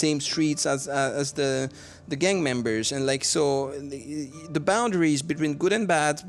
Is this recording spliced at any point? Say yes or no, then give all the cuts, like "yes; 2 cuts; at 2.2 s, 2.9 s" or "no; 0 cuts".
no; 0 cuts